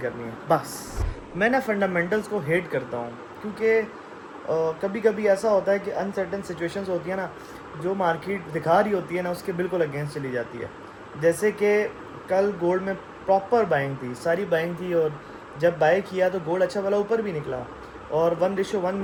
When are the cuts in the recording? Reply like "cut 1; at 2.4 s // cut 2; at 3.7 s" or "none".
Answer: none